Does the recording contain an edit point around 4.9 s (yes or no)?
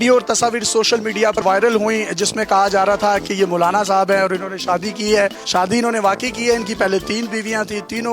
no